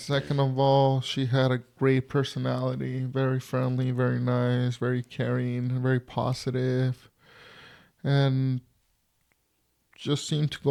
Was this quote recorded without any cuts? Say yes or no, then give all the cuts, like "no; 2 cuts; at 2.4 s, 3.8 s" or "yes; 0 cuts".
yes; 0 cuts